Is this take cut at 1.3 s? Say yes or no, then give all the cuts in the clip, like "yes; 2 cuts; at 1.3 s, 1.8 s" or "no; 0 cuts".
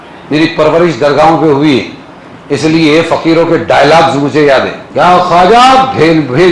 no; 1 cut; at 4.8 s